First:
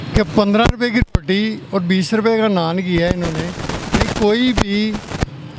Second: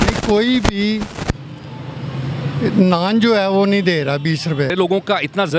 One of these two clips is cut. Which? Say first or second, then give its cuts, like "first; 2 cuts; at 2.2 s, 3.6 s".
second; 1 cut; at 4.7 s